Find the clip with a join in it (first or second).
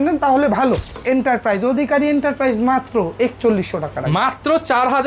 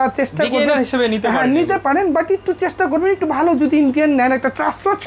first